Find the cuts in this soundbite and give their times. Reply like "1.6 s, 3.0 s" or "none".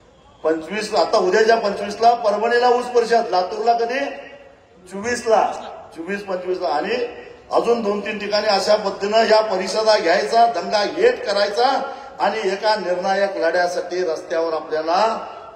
none

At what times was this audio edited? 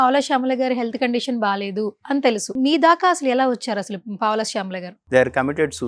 2.5 s, 4.9 s

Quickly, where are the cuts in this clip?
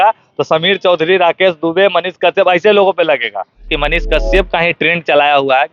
3.7 s

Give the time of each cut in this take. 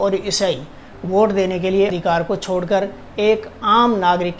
1.9 s

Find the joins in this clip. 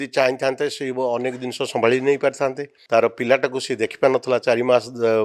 2.7 s

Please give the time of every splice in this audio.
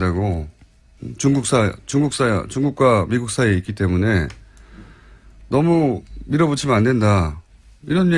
6.6 s

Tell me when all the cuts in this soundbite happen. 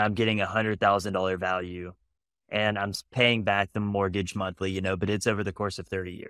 none

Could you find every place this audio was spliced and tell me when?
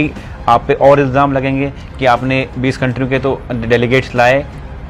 none

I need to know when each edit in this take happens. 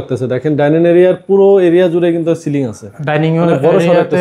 none

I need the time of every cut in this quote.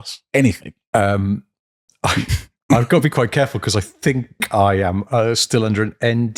none

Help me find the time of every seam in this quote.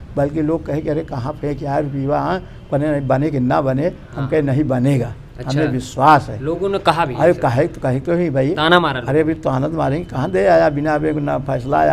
none

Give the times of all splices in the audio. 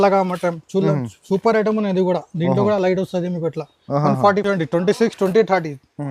4.4 s

